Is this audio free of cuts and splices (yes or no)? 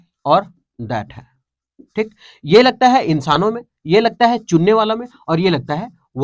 yes